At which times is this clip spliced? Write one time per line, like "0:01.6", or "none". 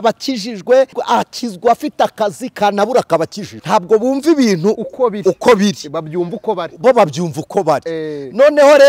0:01.0
0:03.5